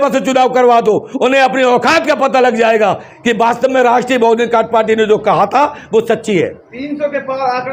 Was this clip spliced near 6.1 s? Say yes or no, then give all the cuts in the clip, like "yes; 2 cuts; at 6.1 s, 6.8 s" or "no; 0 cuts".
no; 0 cuts